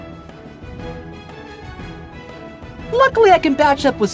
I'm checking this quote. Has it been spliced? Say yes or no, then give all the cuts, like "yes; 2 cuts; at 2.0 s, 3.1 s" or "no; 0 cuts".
yes; 1 cut; at 2.3 s